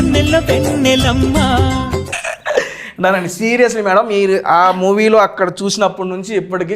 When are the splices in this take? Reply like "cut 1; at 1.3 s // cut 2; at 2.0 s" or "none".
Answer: none